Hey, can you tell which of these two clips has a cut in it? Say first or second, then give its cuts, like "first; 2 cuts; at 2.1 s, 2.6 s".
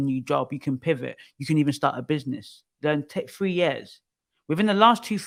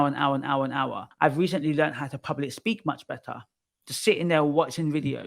second; 1 cut; at 1.1 s